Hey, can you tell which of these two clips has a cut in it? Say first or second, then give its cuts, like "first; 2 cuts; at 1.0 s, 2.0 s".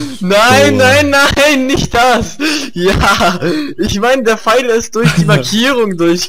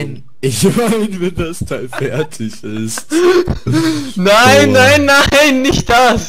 second; 1 cut; at 3.0 s